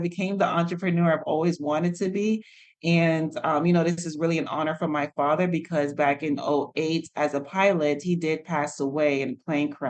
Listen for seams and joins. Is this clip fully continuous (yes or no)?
yes